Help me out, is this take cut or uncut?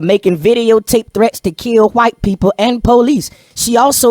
uncut